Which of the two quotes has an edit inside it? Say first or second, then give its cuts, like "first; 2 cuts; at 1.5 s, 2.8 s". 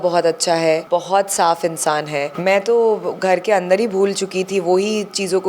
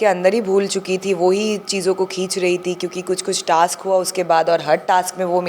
first; 2 cuts; at 0.8 s, 2.3 s